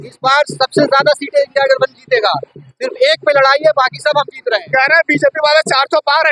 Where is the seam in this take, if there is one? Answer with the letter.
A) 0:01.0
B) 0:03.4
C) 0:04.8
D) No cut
D